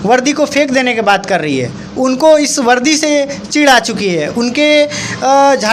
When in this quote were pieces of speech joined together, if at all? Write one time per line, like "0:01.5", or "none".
none